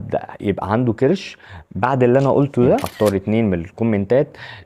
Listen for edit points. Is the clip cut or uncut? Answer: cut